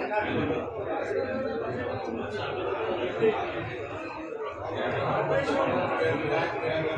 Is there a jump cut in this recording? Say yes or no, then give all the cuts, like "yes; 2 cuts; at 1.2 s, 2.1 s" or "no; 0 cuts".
no; 0 cuts